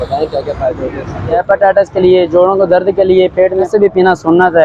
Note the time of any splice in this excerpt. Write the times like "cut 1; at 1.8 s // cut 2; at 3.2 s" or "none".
cut 1; at 1.4 s // cut 2; at 3.7 s